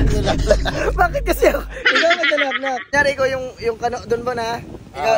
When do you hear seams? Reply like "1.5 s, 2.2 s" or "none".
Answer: 2.9 s